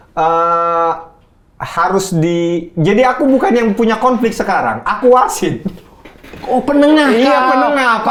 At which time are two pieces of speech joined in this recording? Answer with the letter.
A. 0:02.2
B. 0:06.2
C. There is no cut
C